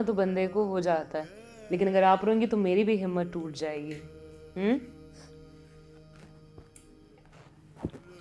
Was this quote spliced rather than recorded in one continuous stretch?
no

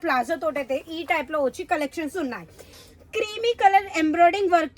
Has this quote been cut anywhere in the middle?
yes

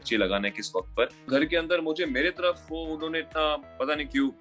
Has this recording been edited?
yes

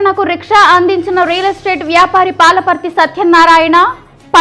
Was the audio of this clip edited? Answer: no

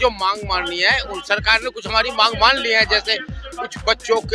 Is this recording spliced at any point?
no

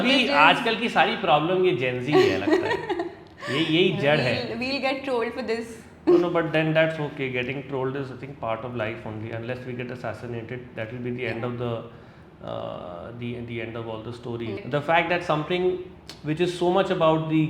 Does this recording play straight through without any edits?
no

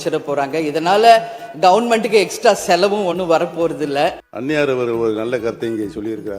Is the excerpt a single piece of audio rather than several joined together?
no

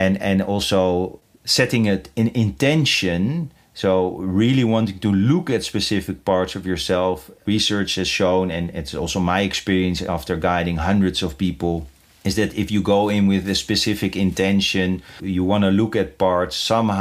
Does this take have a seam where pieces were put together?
no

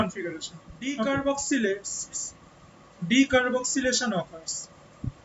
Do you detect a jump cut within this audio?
yes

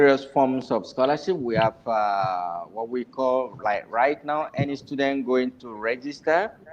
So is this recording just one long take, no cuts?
yes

